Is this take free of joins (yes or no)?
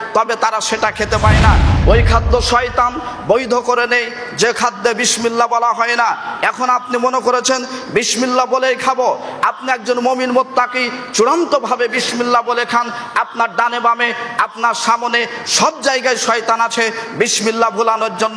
no